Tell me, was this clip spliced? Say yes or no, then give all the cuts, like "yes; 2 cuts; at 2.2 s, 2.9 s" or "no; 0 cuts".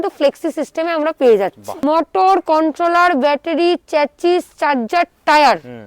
yes; 1 cut; at 1.7 s